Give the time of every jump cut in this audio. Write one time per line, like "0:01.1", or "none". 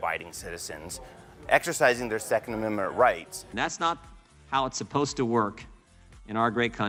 none